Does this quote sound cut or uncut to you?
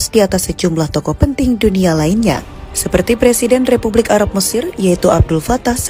uncut